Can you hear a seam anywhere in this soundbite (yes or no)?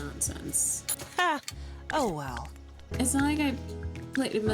yes